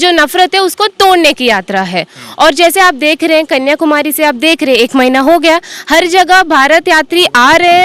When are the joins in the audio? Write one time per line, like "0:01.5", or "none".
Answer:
none